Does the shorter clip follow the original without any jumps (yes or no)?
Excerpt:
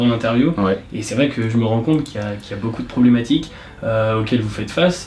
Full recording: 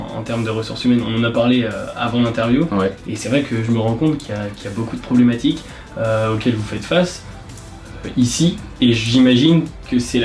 yes